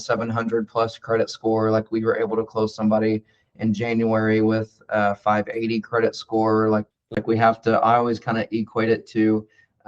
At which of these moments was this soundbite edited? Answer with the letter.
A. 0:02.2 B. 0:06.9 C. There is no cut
B